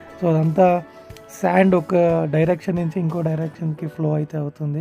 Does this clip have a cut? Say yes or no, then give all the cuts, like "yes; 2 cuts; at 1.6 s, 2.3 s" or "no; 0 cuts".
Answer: no; 0 cuts